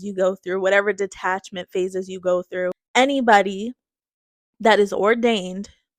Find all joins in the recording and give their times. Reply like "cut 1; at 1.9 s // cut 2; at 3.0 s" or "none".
cut 1; at 2.8 s